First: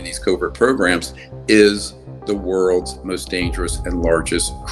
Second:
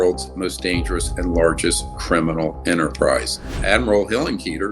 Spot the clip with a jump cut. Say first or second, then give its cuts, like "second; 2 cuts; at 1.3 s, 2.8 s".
second; 1 cut; at 3.5 s